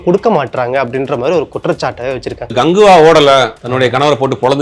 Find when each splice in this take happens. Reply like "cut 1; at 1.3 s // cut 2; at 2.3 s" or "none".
cut 1; at 2.5 s // cut 2; at 3.6 s